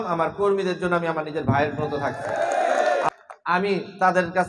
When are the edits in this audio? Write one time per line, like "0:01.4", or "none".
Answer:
0:03.1